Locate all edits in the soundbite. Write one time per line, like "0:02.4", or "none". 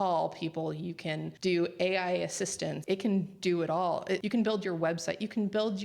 0:01.3
0:02.8
0:04.2